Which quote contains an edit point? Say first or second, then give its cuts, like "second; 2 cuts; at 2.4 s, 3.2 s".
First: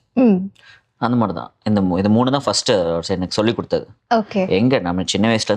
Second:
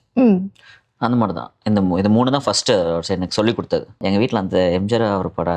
second; 1 cut; at 4.0 s